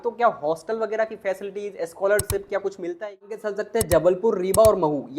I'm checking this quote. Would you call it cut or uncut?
cut